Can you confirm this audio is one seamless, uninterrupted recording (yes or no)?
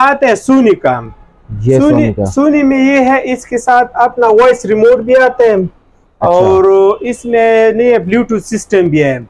yes